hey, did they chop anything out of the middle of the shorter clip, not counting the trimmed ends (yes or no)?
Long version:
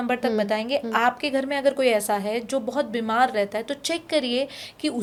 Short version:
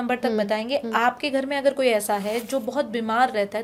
no